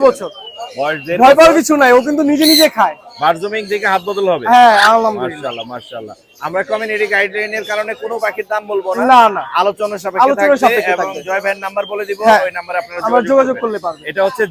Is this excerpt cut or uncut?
uncut